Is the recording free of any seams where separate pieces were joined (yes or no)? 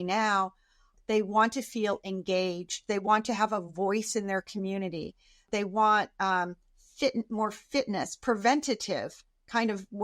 no